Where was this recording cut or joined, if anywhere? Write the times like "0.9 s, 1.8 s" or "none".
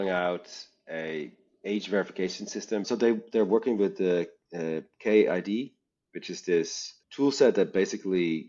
2.8 s